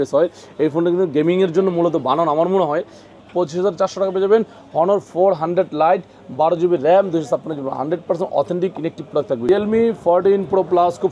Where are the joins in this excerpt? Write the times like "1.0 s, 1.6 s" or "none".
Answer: 3.1 s, 9.5 s

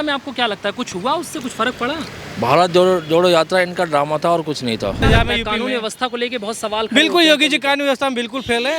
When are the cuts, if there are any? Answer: 5.0 s

